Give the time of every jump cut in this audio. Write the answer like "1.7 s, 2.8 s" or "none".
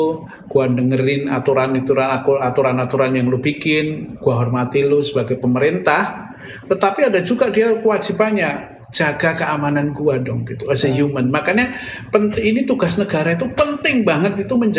none